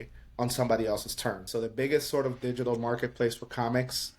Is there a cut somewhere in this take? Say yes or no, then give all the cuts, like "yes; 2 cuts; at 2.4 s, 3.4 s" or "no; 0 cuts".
yes; 1 cut; at 1.4 s